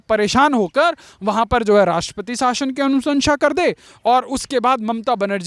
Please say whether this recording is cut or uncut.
uncut